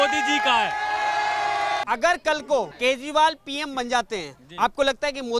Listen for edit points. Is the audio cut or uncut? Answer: cut